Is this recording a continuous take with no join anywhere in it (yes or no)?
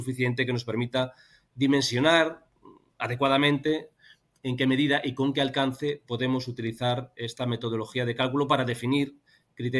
yes